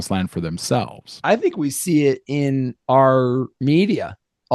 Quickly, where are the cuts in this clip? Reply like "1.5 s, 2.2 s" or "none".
1.0 s